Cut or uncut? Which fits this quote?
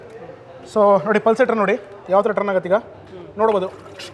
uncut